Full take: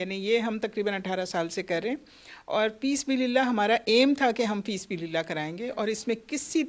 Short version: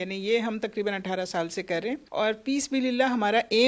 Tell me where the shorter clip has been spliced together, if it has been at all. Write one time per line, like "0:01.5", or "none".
0:02.0